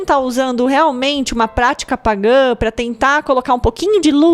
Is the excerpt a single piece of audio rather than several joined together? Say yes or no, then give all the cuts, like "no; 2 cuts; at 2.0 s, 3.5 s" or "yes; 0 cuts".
yes; 0 cuts